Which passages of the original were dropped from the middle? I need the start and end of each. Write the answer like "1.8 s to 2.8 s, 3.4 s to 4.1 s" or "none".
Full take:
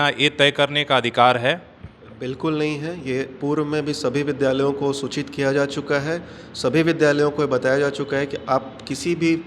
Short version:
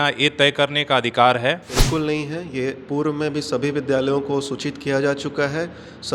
1.7 s to 2.2 s